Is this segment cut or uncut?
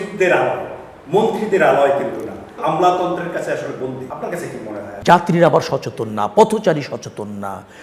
cut